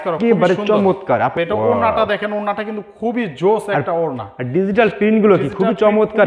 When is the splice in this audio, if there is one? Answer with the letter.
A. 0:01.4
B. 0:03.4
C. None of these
A